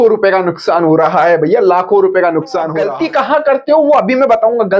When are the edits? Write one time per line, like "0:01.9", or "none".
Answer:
0:02.8

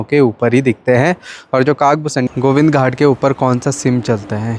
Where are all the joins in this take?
0:02.3

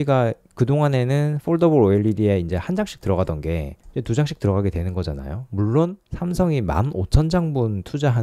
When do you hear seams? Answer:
0:06.0

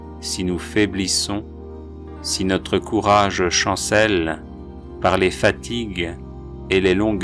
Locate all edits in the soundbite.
none

